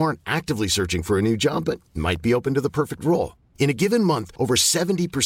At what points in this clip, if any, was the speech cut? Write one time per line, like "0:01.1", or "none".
none